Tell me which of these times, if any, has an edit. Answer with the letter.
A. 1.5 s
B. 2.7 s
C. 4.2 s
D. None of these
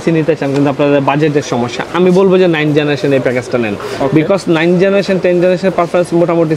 D